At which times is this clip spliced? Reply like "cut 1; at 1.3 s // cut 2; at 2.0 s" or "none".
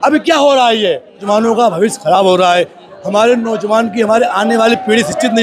cut 1; at 1.2 s